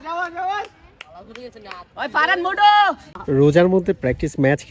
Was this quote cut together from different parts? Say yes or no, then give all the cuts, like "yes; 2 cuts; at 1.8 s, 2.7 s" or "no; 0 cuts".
yes; 1 cut; at 3.1 s